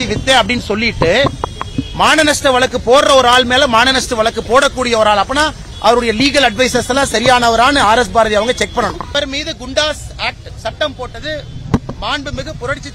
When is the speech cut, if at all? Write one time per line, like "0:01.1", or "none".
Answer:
0:09.1